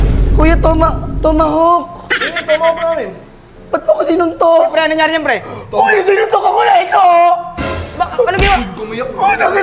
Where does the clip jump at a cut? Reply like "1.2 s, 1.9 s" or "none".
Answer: none